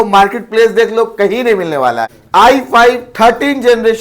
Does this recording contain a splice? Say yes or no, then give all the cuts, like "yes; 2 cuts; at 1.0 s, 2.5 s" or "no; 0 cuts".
yes; 1 cut; at 2.1 s